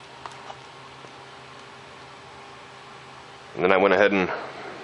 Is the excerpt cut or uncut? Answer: cut